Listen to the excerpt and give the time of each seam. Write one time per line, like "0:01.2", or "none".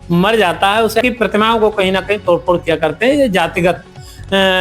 0:01.0